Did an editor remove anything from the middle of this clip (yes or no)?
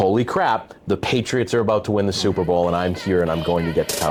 no